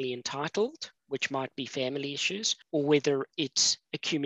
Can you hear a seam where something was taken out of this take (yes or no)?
yes